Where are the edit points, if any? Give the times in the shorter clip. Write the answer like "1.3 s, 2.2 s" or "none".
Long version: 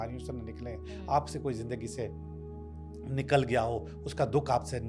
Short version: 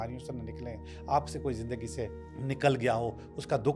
2.3 s